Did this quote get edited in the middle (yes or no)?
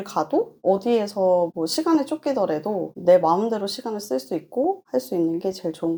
no